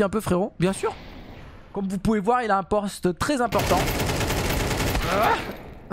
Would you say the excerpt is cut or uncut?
uncut